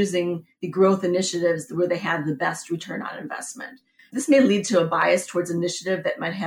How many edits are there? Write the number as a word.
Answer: one